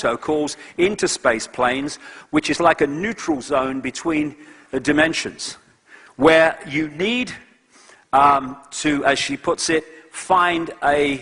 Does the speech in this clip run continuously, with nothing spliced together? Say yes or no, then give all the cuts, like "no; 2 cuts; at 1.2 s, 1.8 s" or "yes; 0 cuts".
yes; 0 cuts